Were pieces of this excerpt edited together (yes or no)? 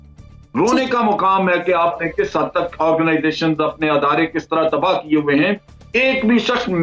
no